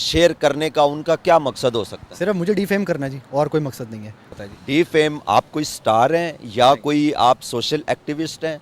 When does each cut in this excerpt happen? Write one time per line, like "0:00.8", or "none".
0:04.2